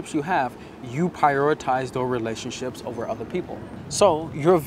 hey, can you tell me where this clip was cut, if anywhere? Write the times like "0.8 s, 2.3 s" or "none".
3.8 s